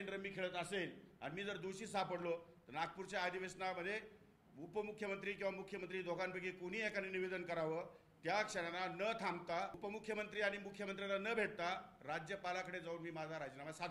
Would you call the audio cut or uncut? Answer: cut